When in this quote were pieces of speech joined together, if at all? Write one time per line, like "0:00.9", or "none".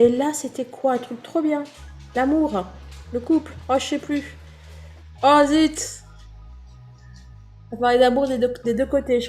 0:06.0
0:07.7